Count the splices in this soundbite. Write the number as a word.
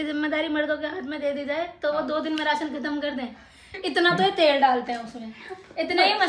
zero